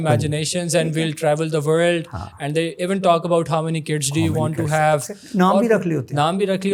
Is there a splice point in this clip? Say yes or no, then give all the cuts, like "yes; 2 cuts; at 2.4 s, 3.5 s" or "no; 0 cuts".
no; 0 cuts